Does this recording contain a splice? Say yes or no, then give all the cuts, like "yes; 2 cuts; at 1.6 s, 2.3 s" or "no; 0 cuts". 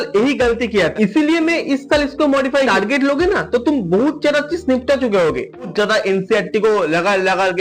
yes; 3 cuts; at 0.9 s, 2.7 s, 5.7 s